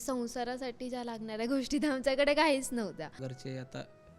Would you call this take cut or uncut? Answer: cut